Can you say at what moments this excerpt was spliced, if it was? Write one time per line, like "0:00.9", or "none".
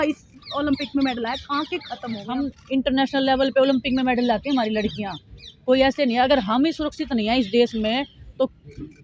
0:02.3